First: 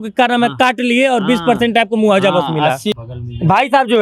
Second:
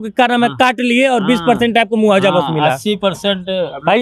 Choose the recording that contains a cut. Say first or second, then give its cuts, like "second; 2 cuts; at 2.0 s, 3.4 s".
first; 1 cut; at 3.0 s